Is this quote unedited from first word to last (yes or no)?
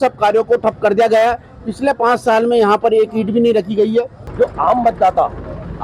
no